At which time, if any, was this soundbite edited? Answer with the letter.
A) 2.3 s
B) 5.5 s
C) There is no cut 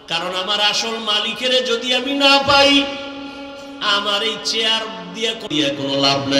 C